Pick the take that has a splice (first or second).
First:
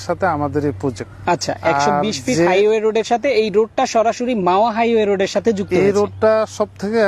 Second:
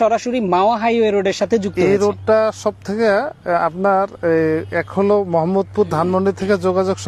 first